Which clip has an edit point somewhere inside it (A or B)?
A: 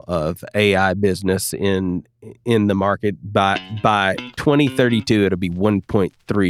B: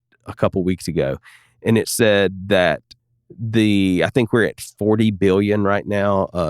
B